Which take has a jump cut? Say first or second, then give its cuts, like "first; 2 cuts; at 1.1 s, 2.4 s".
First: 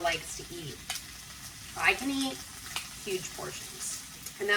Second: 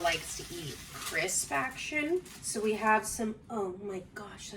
second; 2 cuts; at 1.0 s, 2.4 s